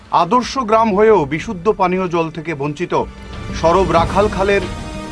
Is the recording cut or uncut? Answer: uncut